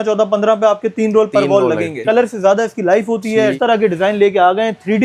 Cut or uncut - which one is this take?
cut